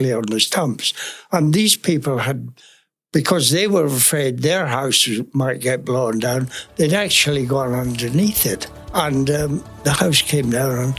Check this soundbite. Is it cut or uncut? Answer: cut